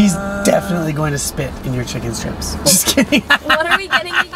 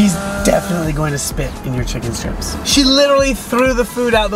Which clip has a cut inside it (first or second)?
second